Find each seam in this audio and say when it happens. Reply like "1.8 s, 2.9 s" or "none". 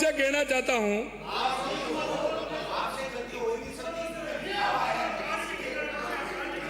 none